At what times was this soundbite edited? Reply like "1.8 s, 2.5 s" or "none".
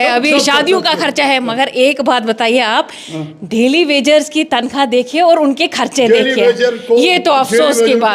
none

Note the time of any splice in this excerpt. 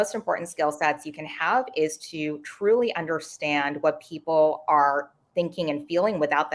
none

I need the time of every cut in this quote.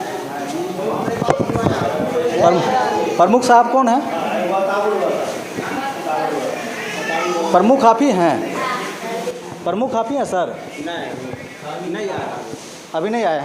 none

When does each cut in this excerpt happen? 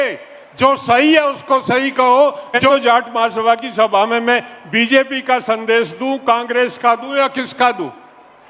2.7 s

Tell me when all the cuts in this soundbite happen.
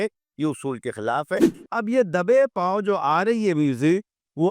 1.6 s

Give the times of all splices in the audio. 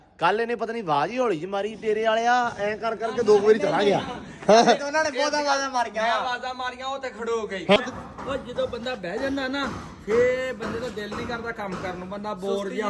7.8 s

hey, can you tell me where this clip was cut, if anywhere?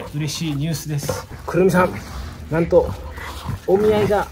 1.3 s

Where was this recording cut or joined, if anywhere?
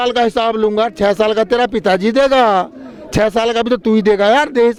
none

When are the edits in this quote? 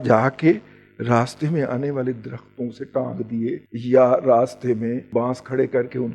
3.7 s, 5.0 s

